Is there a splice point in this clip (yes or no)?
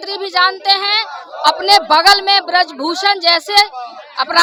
no